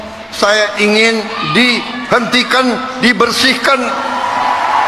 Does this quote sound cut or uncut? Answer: uncut